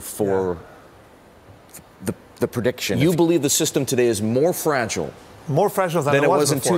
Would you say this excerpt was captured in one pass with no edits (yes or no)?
no